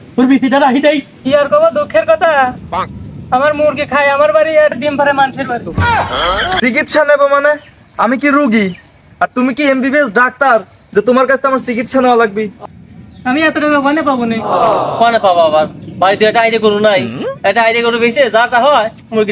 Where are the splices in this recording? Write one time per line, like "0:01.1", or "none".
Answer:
0:01.2
0:06.5
0:12.6